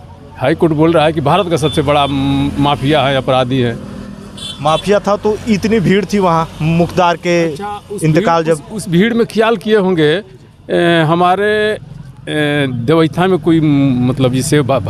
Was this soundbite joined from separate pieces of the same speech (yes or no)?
no